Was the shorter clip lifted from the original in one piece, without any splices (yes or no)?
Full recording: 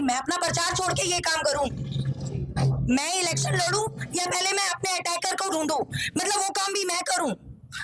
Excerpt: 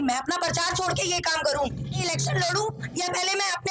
no